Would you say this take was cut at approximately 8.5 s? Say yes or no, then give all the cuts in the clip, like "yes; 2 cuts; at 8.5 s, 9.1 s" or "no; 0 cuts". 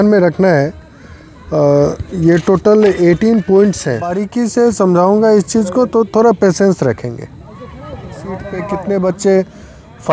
yes; 2 cuts; at 4.2 s, 8.5 s